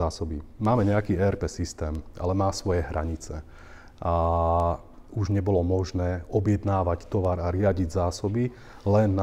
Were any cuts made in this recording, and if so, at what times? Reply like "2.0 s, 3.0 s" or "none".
none